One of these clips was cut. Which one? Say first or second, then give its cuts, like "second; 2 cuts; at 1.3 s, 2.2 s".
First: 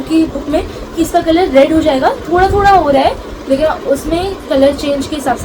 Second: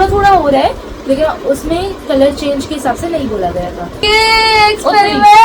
second; 1 cut; at 4.0 s